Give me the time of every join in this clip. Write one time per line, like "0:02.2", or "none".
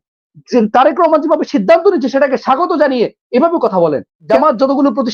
0:04.1